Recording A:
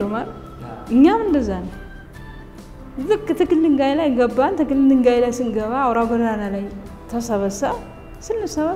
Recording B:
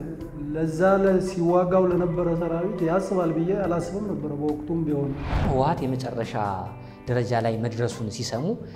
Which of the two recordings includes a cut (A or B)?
B